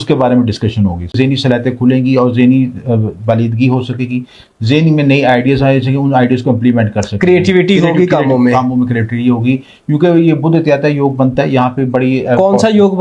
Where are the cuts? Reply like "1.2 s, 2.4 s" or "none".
1.1 s